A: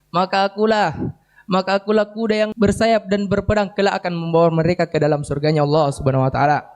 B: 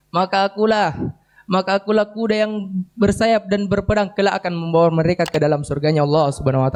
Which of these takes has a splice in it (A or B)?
A